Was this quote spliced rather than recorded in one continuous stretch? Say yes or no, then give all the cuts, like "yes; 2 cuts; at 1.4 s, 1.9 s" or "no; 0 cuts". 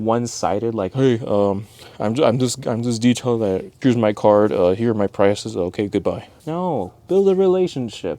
yes; 2 cuts; at 3.7 s, 6.3 s